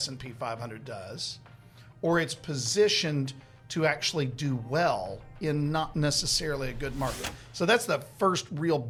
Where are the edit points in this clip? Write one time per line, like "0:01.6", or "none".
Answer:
none